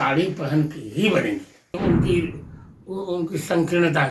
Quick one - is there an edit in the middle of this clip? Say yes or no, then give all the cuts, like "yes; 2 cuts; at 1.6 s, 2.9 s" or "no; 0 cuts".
yes; 1 cut; at 1.8 s